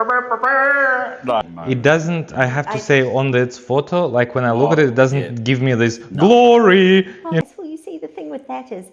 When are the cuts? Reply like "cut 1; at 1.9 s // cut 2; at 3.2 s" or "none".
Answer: cut 1; at 1.4 s // cut 2; at 7.4 s